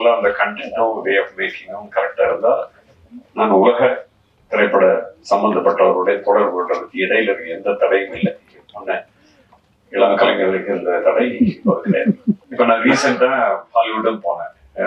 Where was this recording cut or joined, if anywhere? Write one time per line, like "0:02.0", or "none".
0:12.5